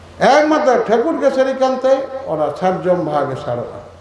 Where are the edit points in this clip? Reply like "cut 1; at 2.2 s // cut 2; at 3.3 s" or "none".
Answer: none